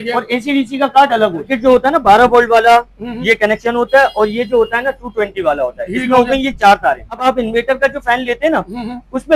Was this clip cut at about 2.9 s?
no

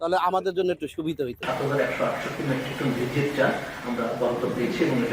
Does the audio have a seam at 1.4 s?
yes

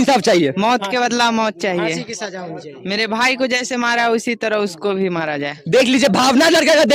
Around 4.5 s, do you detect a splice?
no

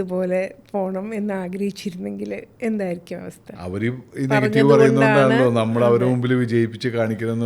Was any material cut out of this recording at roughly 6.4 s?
no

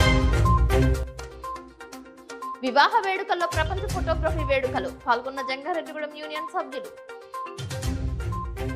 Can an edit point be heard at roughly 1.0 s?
yes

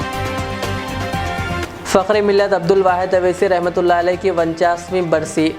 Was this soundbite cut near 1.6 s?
yes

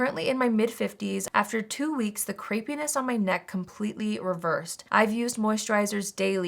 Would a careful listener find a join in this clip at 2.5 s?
no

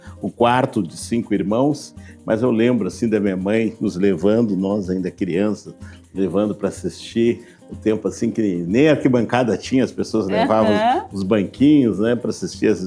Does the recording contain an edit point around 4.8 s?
no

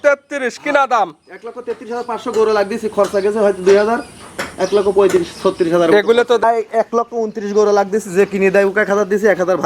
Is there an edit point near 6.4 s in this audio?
yes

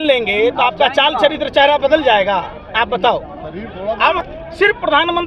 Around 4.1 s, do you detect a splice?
yes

